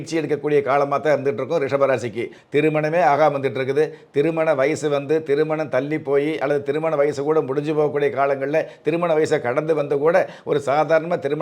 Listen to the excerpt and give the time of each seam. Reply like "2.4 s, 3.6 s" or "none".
2.4 s